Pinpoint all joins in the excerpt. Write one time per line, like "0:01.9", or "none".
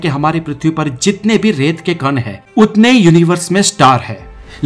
0:02.3